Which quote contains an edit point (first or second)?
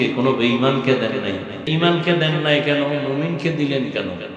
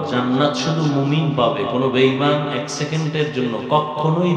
first